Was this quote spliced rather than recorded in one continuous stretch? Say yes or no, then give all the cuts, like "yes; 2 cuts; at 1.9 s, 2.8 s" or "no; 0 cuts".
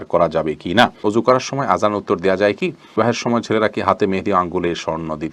yes; 2 cuts; at 1.5 s, 2.9 s